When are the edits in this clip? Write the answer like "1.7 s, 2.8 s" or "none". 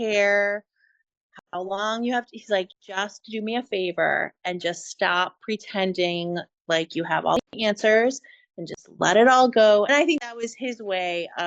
9.9 s